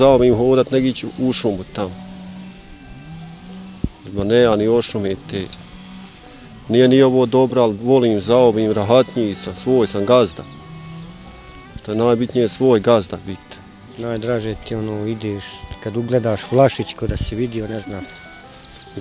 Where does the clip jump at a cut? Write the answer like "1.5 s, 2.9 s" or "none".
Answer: 13.9 s